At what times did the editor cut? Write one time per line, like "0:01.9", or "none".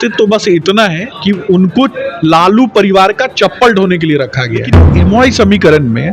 0:01.1
0:04.8

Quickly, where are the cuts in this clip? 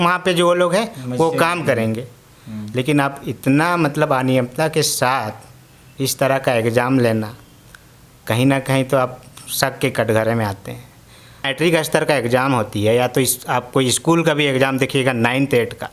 0:11.5

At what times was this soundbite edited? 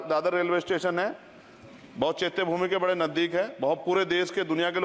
none

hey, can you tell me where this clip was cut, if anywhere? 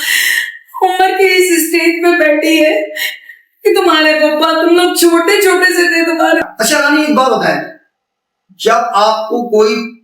0:06.4

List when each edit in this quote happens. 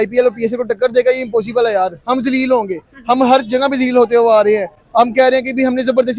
none

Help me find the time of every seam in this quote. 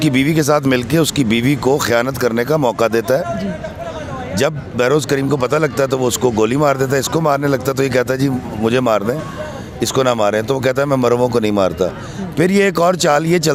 none

